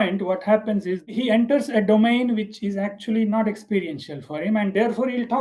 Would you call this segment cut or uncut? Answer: cut